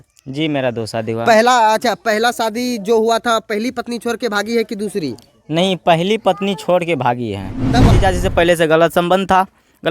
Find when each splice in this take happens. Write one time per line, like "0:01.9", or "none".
0:07.9